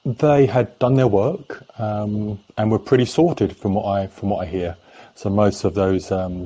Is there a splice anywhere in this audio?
no; 0 cuts

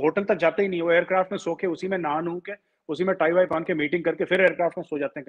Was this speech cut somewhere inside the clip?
no; 0 cuts

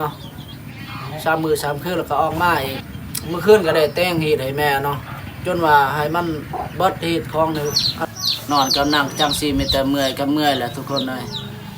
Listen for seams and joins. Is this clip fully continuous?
no; 2 cuts; at 2.8 s, 8.1 s

